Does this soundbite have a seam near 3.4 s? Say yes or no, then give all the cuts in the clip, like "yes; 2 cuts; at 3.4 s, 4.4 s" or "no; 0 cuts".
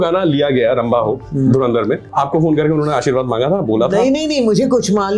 no; 1 cut; at 2.1 s